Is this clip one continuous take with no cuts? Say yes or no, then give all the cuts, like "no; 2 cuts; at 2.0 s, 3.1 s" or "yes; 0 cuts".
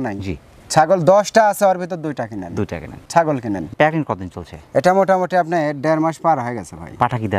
yes; 0 cuts